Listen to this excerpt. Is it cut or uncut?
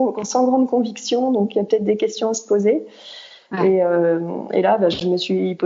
uncut